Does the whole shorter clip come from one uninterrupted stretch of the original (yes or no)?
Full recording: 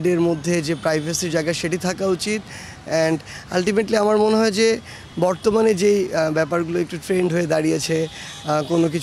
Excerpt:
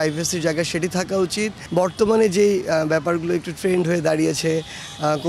no